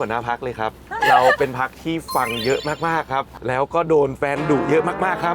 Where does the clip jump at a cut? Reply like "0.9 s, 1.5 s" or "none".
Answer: 0.9 s, 3.3 s